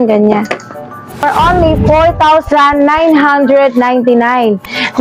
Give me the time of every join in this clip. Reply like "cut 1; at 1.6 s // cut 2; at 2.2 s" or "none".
cut 1; at 1.2 s